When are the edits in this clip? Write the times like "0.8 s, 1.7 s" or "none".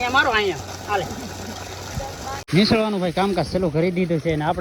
2.4 s